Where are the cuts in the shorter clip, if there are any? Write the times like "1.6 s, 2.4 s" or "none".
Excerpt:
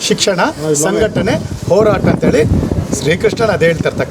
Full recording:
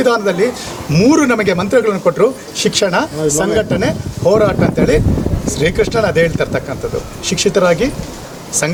none